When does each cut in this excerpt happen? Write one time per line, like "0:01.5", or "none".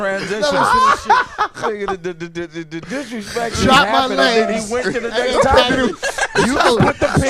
0:03.5